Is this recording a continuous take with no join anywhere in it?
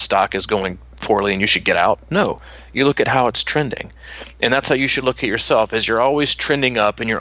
yes; 0 cuts

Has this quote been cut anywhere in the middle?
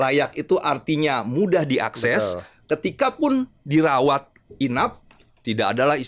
no; 0 cuts

